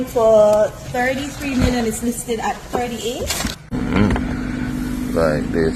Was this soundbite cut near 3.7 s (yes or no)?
yes